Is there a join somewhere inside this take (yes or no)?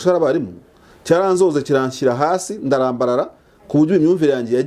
no